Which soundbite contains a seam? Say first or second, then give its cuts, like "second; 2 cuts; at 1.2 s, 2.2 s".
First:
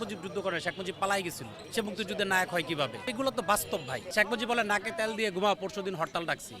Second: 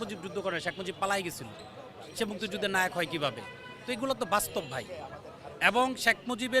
first; 3 cuts; at 1.5 s, 3.0 s, 4.0 s